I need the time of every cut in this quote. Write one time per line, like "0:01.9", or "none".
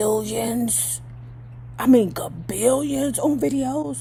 none